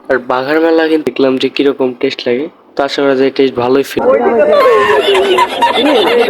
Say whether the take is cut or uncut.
cut